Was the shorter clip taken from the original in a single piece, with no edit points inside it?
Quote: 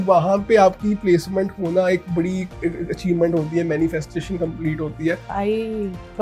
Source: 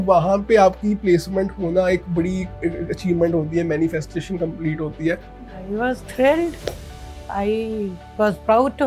no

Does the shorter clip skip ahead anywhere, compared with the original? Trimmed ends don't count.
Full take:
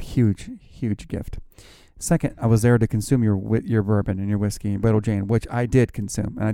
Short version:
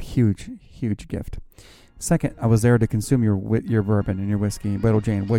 no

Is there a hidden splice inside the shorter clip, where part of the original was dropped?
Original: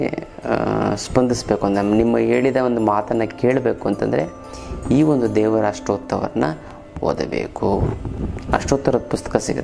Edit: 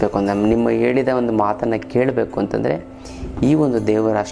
no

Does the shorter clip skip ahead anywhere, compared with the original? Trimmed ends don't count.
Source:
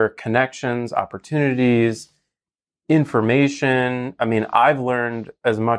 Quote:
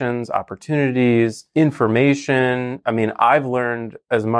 yes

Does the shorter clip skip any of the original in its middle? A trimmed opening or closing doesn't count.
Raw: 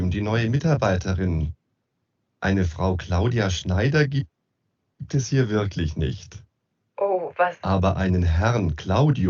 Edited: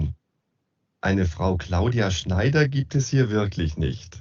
yes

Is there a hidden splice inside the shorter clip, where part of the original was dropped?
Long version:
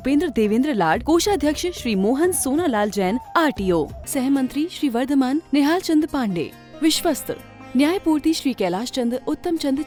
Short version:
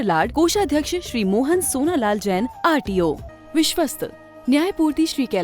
yes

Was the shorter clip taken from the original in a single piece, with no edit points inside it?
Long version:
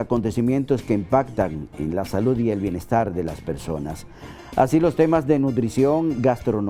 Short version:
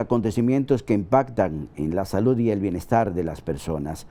yes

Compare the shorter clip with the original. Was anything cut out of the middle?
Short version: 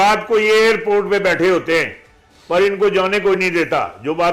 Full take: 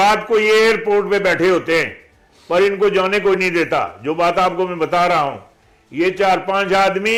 no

